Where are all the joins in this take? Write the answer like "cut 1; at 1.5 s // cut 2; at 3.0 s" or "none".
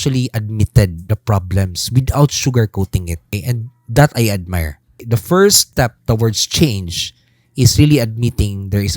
cut 1; at 1.0 s // cut 2; at 3.3 s // cut 3; at 5.0 s // cut 4; at 5.6 s